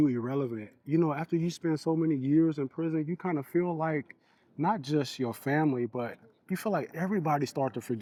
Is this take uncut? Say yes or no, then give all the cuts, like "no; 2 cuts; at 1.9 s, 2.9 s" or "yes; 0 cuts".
yes; 0 cuts